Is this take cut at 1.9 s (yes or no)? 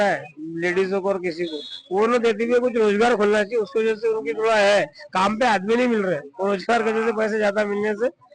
no